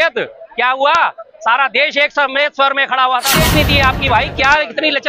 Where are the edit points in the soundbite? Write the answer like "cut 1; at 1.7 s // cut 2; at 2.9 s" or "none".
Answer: cut 1; at 3.4 s